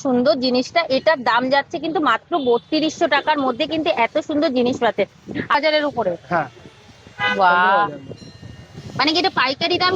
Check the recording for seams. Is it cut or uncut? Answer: cut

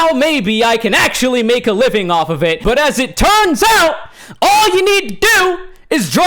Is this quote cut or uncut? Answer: cut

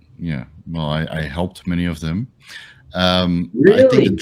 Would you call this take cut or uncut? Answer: uncut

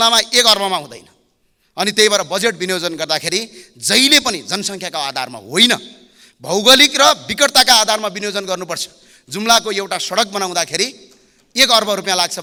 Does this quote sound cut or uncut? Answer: uncut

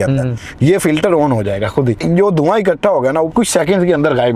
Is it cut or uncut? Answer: cut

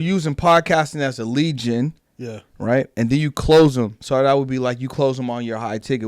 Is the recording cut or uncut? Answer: cut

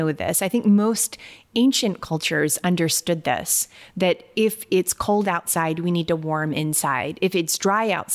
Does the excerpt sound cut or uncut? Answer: uncut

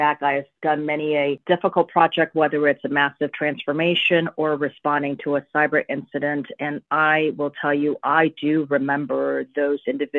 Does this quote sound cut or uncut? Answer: cut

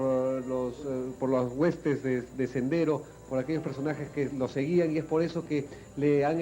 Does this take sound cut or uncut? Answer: cut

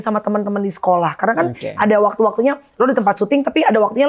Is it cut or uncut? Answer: uncut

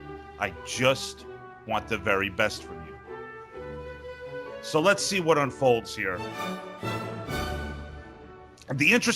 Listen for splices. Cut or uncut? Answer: cut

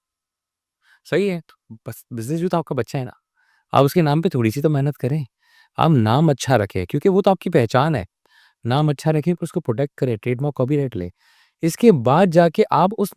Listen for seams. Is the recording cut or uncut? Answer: uncut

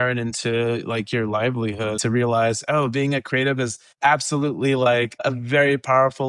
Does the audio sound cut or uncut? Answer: cut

